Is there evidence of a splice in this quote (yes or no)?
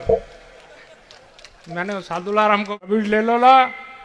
yes